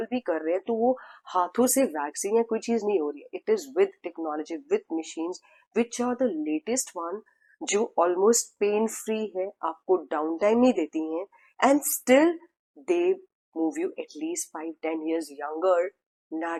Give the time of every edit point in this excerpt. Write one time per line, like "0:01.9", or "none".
none